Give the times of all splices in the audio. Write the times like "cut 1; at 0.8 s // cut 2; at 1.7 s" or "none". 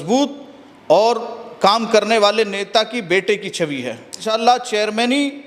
cut 1; at 4.1 s